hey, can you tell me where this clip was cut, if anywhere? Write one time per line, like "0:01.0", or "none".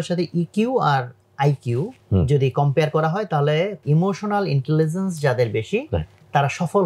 0:02.0
0:03.8

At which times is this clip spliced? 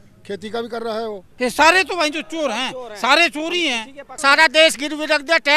0:01.3
0:04.0

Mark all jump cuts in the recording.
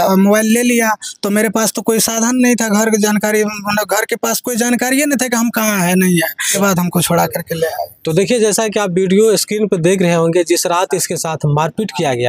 0:06.5

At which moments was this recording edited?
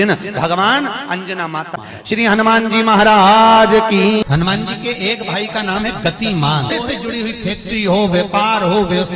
0:01.8
0:04.2
0:06.7

